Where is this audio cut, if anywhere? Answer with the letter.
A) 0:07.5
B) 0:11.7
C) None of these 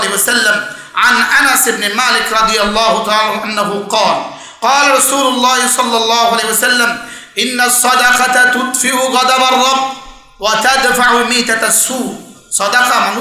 C